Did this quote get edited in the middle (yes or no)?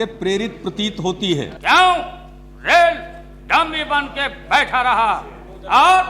yes